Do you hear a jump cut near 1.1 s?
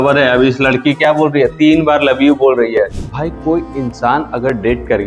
no; 1 cut; at 3.0 s

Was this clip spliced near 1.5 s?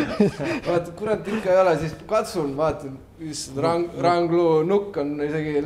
no; 0 cuts

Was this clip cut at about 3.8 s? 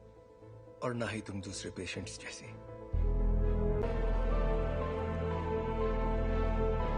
yes; 1 cut; at 3.8 s

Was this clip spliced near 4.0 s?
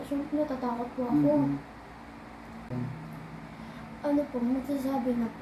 no; 1 cut; at 2.7 s

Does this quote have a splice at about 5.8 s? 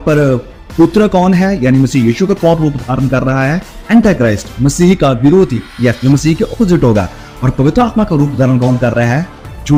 no; 0 cuts

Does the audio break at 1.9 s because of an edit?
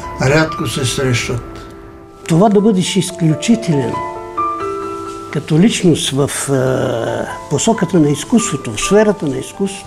yes; 1 cut; at 1.9 s

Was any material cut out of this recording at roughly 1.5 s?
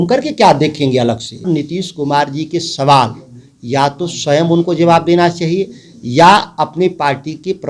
yes; 1 cut; at 1.5 s

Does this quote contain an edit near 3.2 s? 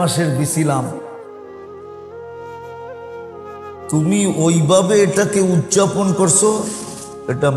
yes; 2 cuts; at 1.0 s, 3.2 s

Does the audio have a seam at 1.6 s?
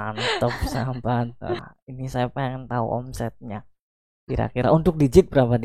yes; 1 cut; at 1.6 s

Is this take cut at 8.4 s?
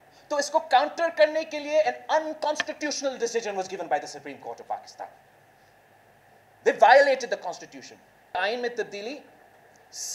yes; 1 cut; at 8.4 s

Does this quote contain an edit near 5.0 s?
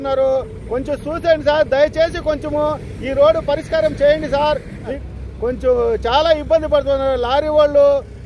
yes; 1 cut; at 5.0 s

